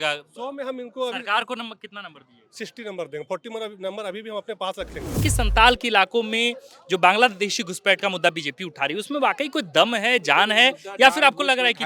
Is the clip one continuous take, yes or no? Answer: no